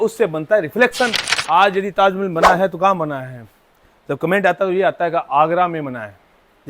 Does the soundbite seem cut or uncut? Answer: cut